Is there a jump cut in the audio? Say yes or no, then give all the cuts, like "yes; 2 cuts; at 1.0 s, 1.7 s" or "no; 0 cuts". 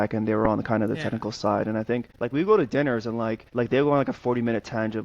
yes; 2 cuts; at 2.1 s, 3.4 s